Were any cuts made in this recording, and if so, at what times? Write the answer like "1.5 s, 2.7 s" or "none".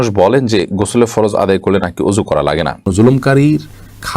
2.9 s

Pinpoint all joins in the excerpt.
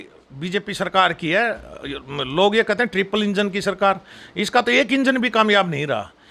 none

